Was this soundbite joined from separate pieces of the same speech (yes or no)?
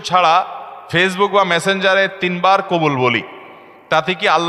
no